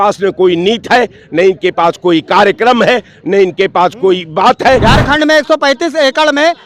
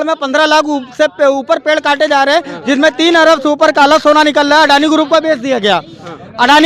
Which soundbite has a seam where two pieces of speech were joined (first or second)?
first